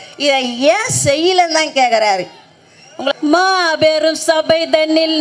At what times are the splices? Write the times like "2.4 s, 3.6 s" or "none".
3.1 s